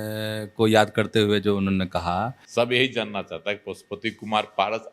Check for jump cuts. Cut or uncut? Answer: cut